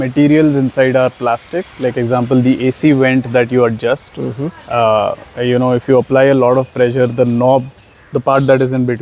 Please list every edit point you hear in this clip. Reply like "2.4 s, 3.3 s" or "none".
none